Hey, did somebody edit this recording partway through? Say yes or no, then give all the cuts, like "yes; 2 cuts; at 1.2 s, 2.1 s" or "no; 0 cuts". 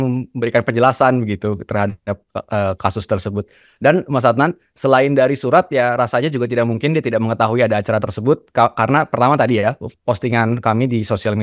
no; 0 cuts